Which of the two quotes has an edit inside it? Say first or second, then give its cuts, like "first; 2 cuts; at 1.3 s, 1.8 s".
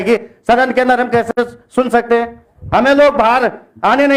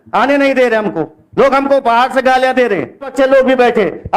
second; 1 cut; at 3.1 s